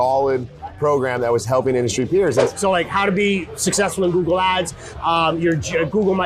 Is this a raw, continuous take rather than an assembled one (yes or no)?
no